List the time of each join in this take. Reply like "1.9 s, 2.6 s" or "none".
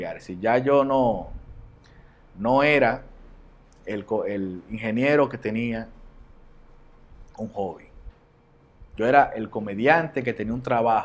none